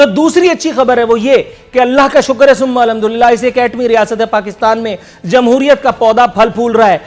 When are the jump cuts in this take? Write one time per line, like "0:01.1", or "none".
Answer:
none